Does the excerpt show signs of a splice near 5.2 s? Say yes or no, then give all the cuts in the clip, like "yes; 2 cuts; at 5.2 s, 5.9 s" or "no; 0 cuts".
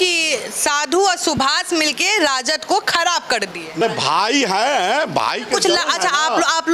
no; 1 cut; at 3.8 s